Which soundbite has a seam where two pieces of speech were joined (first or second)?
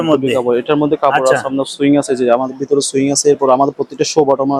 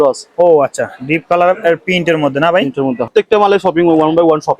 second